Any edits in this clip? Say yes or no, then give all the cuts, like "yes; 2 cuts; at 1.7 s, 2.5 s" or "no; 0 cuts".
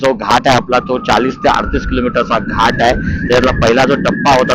no; 0 cuts